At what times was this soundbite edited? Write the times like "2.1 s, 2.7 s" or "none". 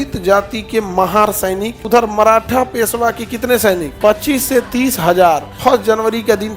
1.8 s, 3.9 s, 5.5 s